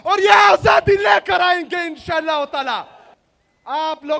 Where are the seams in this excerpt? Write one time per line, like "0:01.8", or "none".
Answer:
none